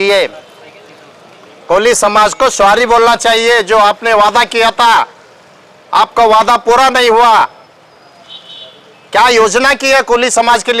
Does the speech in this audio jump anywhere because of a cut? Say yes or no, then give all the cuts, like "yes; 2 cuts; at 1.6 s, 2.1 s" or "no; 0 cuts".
no; 0 cuts